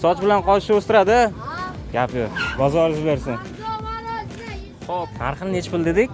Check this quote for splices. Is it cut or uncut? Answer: cut